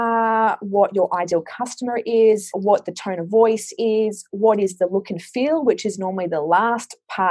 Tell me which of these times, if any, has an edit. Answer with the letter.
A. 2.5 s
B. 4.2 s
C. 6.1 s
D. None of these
A